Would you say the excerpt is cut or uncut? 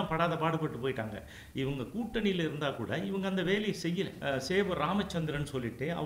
cut